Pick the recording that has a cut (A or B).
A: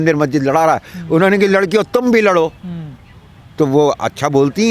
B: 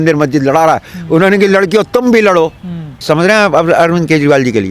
B